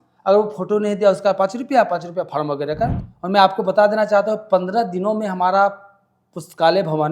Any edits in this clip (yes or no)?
yes